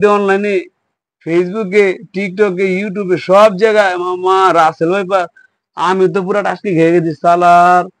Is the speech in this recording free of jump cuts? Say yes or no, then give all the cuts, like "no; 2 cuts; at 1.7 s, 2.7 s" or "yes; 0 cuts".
yes; 0 cuts